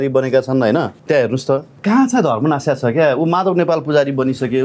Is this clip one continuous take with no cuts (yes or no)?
no